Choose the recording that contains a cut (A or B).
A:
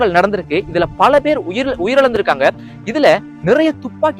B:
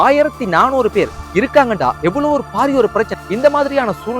B